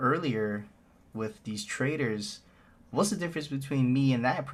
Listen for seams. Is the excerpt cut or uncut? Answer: uncut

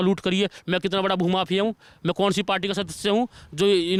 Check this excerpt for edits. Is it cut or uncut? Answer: uncut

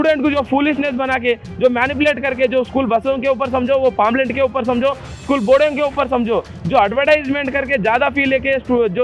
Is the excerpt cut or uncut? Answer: uncut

